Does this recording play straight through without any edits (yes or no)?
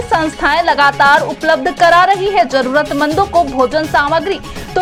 yes